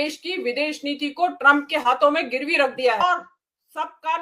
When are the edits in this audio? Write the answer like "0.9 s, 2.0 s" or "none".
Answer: 3.0 s